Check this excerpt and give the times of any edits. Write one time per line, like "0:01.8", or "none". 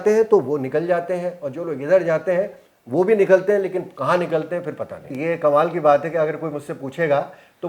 0:05.1